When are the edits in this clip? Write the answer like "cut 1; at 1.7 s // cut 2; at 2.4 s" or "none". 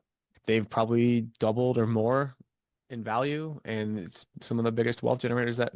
none